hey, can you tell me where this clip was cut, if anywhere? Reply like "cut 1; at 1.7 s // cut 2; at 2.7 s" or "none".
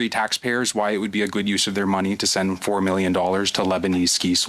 none